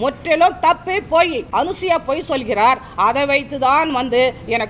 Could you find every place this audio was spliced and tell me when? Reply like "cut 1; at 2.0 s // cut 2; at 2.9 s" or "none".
cut 1; at 1.4 s